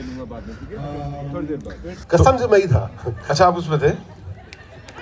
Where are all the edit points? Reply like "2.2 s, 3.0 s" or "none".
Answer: 2.0 s